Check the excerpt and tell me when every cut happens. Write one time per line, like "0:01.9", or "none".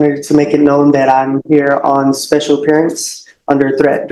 none